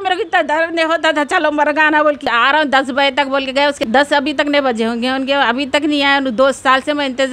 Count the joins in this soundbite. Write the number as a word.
two